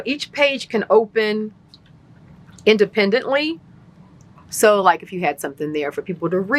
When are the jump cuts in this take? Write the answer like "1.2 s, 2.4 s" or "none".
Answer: none

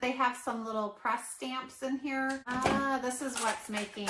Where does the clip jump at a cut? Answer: 2.5 s

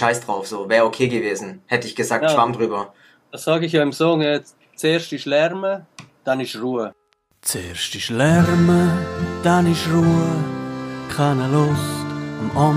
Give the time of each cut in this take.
6.9 s

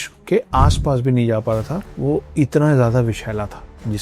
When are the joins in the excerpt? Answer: 1.8 s

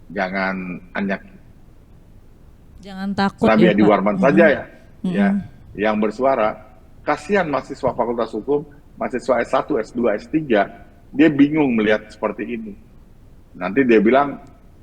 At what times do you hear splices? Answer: none

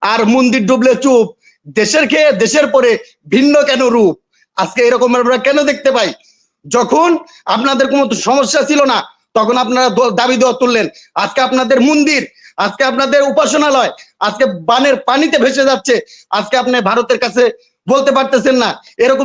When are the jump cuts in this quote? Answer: none

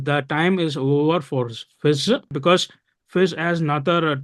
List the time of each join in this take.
2.3 s

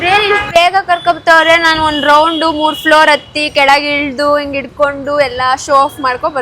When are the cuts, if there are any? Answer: none

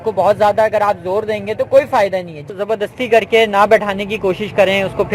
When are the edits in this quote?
2.5 s

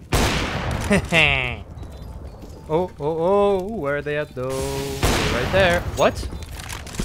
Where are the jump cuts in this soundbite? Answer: none

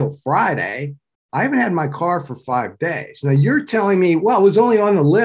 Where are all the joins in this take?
none

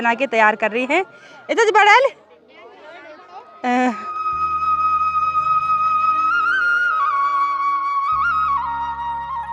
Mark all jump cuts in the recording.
none

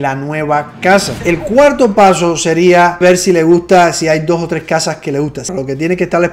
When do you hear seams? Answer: 1.2 s, 3.0 s, 5.5 s

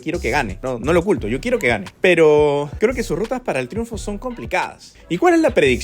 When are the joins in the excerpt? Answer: 4.8 s

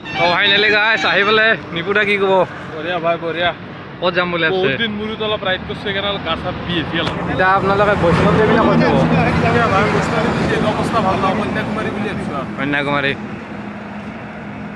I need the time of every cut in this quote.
none

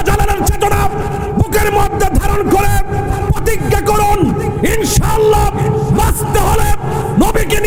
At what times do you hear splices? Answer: none

